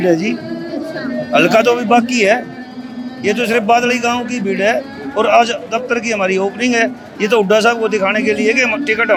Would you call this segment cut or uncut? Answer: uncut